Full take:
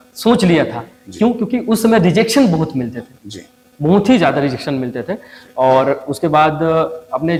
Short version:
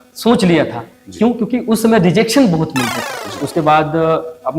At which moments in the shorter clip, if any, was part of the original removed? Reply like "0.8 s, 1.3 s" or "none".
3.4 s